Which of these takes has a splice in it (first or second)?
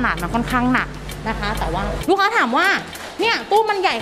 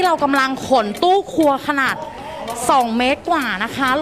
first